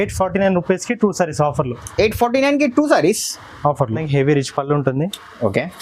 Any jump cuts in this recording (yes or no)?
yes